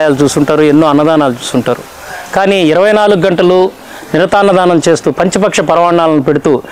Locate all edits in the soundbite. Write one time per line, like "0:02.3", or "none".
none

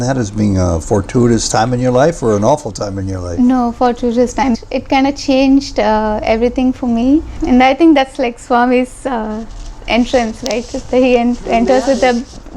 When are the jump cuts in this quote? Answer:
0:04.5
0:07.4

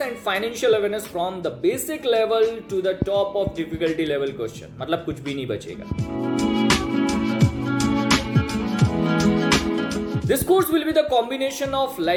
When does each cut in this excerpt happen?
none

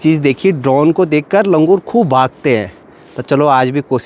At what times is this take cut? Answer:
none

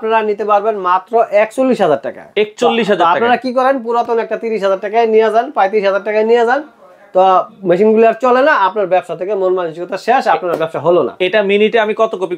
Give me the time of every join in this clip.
none

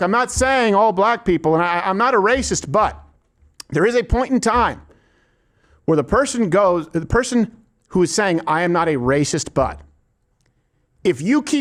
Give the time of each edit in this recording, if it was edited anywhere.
none

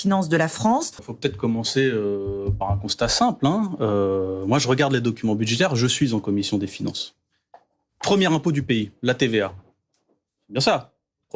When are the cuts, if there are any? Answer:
0:02.3

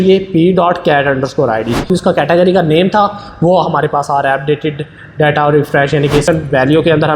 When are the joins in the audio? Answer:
0:01.9
0:06.2

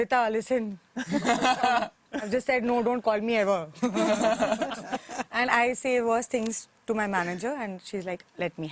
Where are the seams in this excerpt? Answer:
none

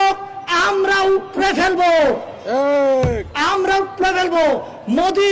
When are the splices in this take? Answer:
none

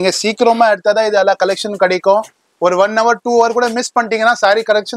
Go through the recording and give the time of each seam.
none

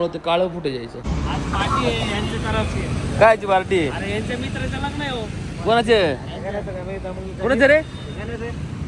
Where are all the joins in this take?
0:01.0

